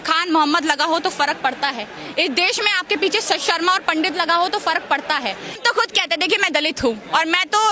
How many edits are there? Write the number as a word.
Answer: one